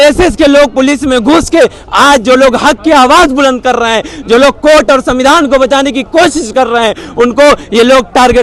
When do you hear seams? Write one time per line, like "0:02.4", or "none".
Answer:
none